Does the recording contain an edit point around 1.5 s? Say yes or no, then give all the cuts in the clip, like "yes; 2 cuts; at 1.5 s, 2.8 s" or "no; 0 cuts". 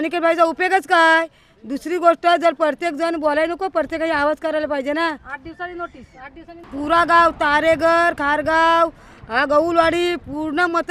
no; 0 cuts